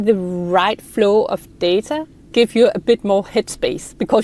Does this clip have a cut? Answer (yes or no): yes